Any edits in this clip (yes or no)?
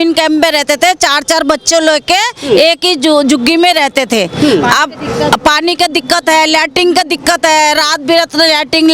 no